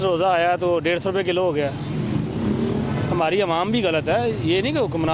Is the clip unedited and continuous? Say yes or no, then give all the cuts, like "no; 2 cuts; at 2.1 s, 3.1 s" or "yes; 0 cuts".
yes; 0 cuts